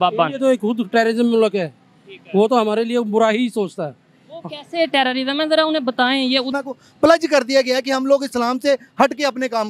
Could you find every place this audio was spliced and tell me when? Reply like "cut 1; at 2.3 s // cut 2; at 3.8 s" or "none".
cut 1; at 6.5 s